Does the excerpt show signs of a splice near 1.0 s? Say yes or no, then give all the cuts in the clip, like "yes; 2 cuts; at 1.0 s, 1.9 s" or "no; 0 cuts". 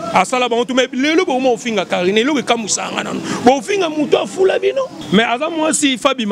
no; 1 cut; at 5.0 s